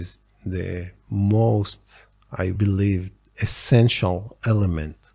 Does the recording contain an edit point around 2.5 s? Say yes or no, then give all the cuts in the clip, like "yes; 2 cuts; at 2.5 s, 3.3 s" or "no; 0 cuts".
yes; 1 cut; at 2.5 s